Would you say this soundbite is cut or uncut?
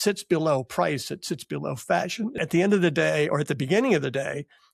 cut